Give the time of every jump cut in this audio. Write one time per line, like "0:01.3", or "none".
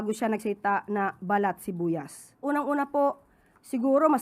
0:02.4